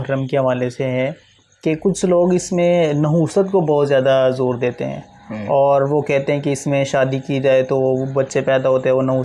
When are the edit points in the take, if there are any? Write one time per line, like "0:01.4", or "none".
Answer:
none